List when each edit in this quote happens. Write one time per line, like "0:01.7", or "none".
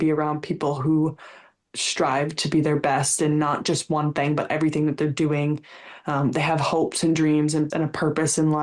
0:07.7